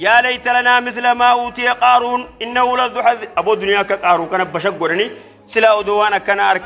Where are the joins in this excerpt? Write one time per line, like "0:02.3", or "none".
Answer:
none